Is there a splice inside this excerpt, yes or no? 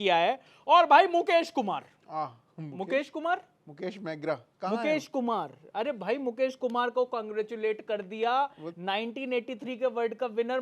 no